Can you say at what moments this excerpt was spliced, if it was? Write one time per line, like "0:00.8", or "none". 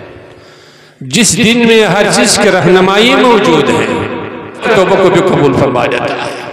0:04.6